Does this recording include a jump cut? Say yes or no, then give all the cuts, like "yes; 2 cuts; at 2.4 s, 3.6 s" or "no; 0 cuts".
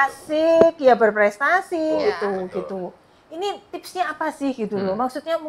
yes; 1 cut; at 2.0 s